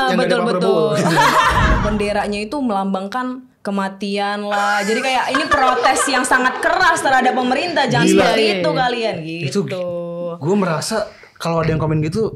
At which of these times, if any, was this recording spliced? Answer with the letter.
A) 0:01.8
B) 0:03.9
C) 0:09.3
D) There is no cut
A